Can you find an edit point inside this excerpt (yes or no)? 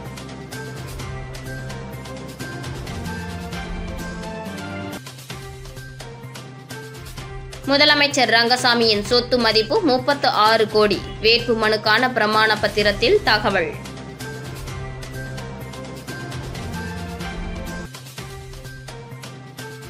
no